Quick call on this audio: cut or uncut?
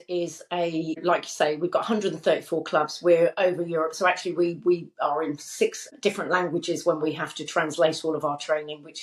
cut